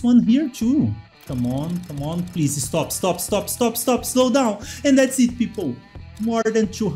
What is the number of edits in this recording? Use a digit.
1